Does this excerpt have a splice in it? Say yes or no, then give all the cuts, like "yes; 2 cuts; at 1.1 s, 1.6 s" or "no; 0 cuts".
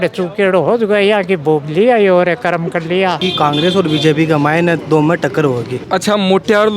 yes; 2 cuts; at 3.2 s, 5.8 s